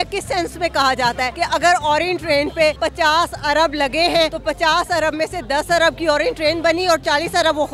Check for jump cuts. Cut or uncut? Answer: cut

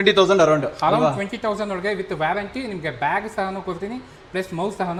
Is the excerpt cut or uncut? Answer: uncut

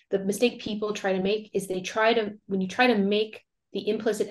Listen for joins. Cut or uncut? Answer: uncut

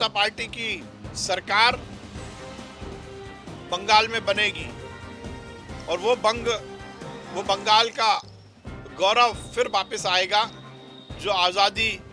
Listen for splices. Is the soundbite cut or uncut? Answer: cut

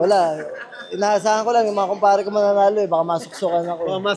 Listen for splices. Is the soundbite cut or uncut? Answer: uncut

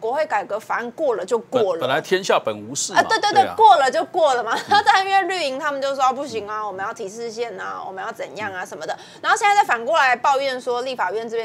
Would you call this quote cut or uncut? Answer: uncut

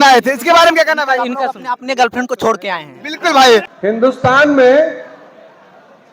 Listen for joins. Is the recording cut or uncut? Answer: cut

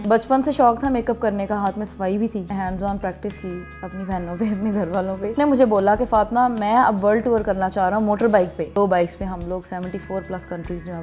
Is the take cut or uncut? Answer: cut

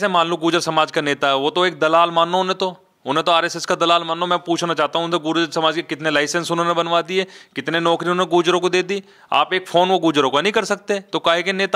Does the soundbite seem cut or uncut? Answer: uncut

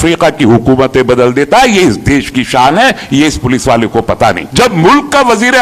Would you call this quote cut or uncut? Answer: cut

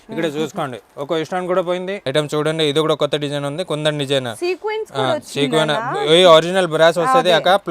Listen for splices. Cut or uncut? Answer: cut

